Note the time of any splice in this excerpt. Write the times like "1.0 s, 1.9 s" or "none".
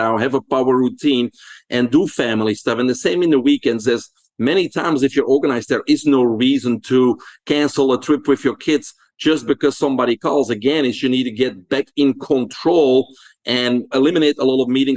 13.9 s